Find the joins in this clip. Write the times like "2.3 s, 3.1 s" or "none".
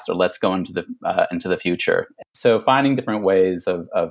2.2 s